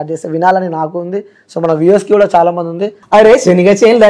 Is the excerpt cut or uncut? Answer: cut